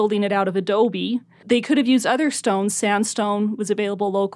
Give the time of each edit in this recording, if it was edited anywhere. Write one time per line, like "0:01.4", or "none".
0:01.3